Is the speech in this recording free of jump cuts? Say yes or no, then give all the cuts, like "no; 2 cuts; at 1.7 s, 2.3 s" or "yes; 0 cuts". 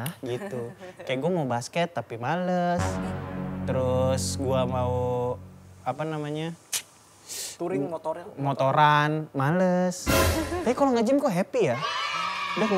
yes; 0 cuts